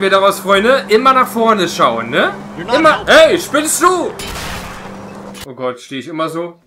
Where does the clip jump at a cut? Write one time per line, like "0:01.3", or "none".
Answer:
0:05.4